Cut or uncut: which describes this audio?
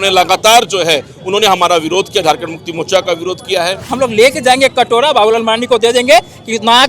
cut